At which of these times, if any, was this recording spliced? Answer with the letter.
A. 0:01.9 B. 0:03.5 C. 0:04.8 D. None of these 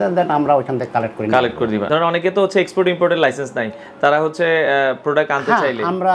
A